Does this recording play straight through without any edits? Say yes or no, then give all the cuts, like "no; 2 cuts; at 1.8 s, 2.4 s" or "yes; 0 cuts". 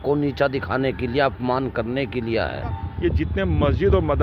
no; 1 cut; at 2.9 s